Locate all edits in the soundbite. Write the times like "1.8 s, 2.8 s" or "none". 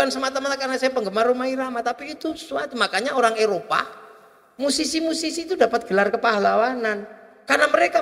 none

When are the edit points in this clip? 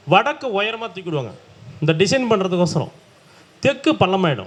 none

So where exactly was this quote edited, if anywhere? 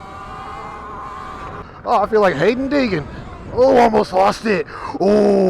1.6 s

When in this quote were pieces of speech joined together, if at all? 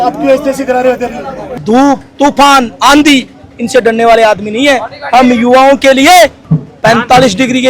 1.6 s

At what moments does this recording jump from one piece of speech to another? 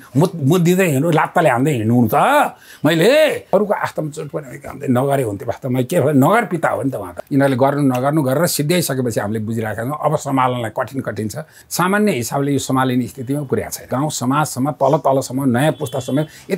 3.5 s, 7.2 s, 11.6 s, 13.9 s

